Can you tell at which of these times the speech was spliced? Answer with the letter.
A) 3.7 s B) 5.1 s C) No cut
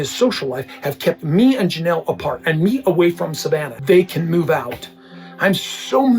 A